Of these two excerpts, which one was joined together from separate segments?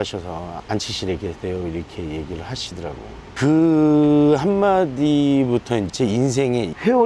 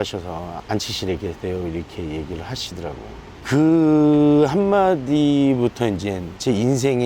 first; 2 cuts; at 3.2 s, 5.9 s

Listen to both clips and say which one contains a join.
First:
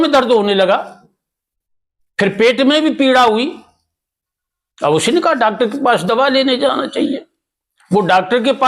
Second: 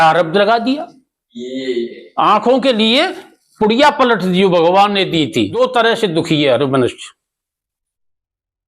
second; 1 cut; at 5.5 s

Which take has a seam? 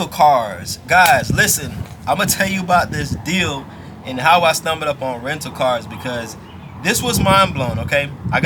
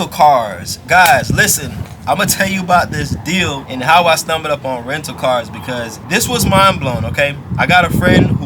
second; 2 cuts; at 3.7 s, 6.0 s

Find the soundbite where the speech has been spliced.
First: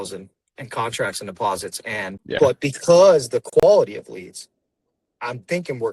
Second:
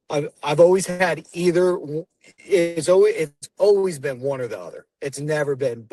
first; 1 cut; at 2.2 s

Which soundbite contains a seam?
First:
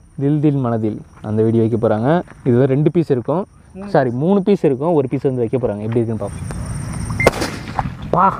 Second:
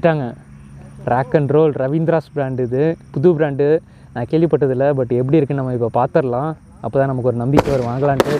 first; 1 cut; at 6.3 s

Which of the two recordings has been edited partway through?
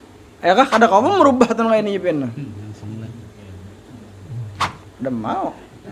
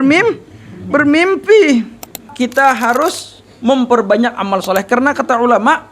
second; 1 cut; at 2.3 s

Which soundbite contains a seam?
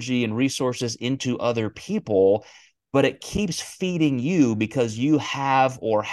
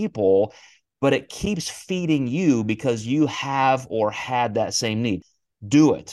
second; 1 cut; at 5.2 s

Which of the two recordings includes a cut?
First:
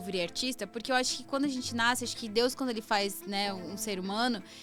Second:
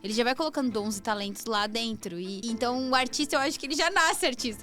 second; 1 cut; at 2.4 s

